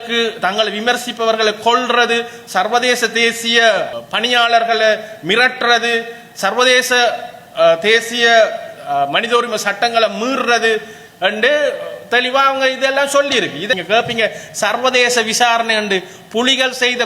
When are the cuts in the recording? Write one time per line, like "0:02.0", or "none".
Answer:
0:13.7